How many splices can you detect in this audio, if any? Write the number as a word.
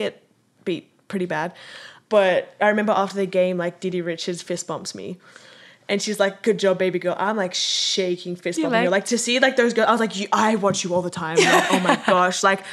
two